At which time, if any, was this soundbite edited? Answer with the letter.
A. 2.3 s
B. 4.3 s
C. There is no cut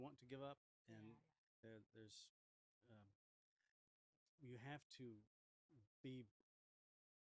C